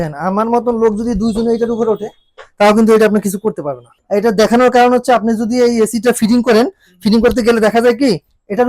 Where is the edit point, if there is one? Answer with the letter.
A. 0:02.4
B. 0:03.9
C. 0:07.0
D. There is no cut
B